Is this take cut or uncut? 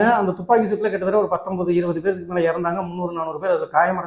uncut